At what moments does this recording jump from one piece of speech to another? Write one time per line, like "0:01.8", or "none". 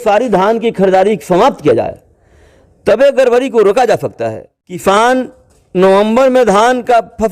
0:04.8